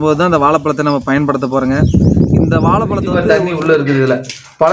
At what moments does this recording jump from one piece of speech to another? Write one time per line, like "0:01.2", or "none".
0:03.2